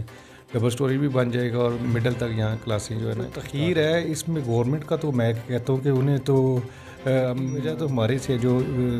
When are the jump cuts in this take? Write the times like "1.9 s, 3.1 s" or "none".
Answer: 3.4 s, 7.6 s